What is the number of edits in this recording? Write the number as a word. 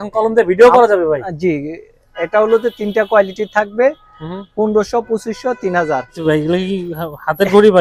one